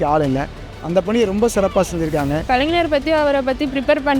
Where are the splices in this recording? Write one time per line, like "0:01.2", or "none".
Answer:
0:02.4